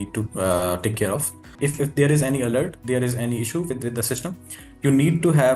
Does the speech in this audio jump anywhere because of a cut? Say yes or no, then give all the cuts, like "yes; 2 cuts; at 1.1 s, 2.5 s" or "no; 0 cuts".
yes; 1 cut; at 1.4 s